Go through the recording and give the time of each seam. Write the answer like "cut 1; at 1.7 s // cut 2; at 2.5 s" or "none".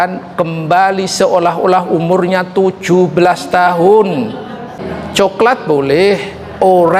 cut 1; at 4.8 s